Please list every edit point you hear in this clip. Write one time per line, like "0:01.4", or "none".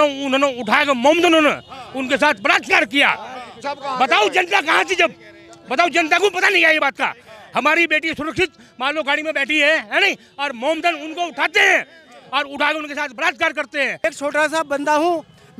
0:13.9